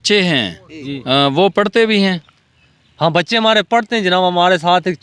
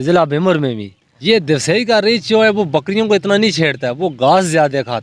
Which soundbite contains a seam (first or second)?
second